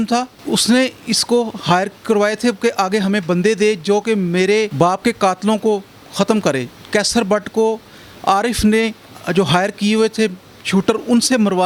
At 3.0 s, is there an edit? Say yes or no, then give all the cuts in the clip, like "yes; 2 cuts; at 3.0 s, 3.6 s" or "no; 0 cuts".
no; 0 cuts